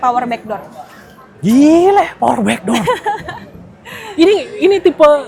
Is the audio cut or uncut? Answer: uncut